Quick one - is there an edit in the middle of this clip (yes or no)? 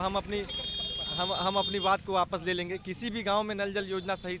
no